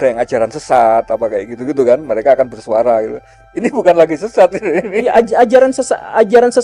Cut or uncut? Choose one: uncut